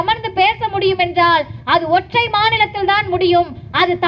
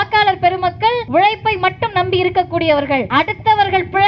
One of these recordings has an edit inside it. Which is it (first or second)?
second